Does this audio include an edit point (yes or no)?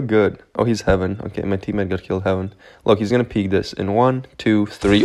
no